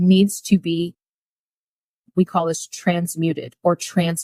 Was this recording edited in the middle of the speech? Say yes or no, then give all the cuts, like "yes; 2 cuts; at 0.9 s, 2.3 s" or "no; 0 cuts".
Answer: no; 0 cuts